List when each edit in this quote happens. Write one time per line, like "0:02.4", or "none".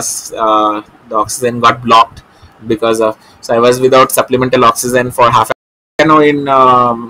0:06.0